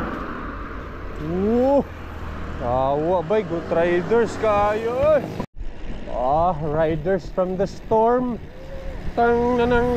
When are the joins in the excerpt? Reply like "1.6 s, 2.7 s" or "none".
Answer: 5.5 s